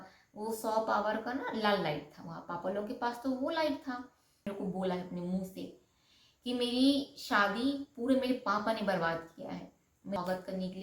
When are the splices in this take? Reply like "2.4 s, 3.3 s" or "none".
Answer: 4.5 s, 10.2 s